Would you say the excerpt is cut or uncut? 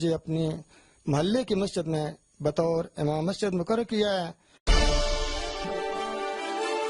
uncut